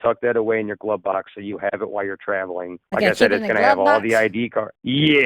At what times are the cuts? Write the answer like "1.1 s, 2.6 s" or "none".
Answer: none